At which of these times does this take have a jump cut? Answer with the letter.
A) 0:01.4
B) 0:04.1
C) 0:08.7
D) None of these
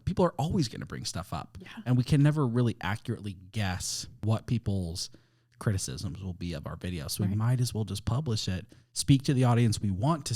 B